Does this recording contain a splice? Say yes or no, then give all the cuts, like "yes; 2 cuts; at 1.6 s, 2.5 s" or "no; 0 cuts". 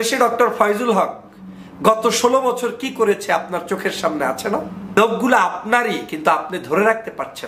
yes; 1 cut; at 5.0 s